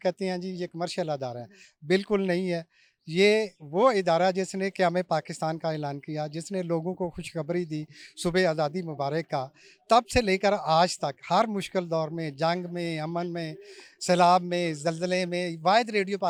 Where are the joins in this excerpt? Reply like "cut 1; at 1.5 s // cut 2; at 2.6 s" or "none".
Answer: none